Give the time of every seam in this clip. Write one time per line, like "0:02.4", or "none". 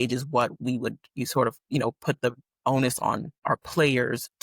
0:03.3